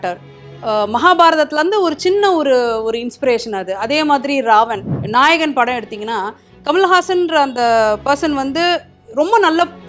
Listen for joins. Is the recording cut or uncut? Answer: cut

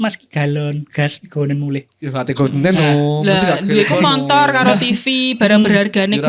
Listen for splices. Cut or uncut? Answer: uncut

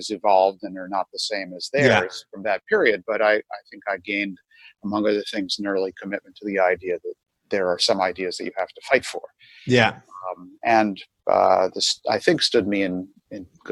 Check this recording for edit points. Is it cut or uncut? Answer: uncut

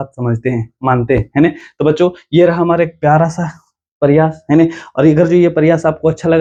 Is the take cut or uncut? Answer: uncut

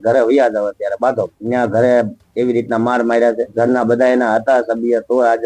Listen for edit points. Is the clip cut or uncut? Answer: cut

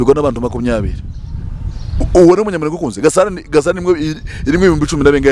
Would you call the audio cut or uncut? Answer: uncut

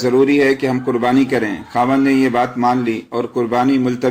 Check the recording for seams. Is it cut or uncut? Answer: cut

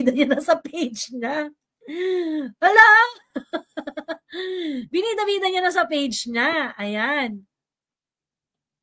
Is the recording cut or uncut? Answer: uncut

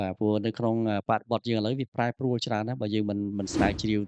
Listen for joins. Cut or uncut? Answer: uncut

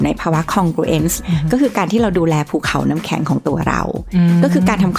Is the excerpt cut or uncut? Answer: cut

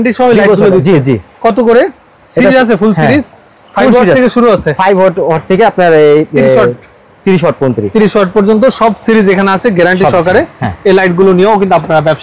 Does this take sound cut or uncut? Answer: uncut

